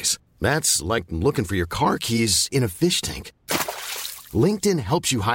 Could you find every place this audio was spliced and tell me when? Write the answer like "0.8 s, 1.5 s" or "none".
none